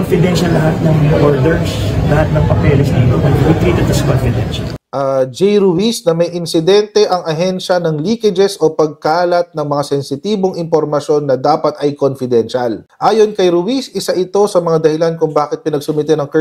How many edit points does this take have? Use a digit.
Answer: 1